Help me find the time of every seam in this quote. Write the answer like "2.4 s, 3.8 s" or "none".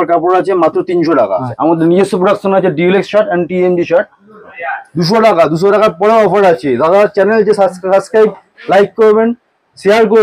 1.5 s, 4.5 s